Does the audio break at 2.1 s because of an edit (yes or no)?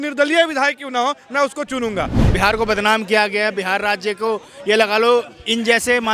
yes